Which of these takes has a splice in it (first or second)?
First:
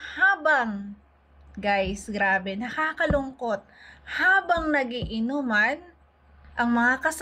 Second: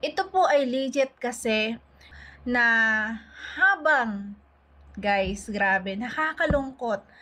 second